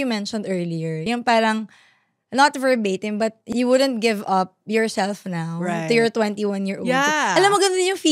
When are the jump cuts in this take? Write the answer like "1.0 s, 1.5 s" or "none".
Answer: none